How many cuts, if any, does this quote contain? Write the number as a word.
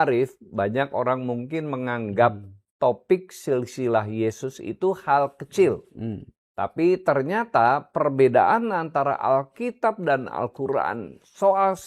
zero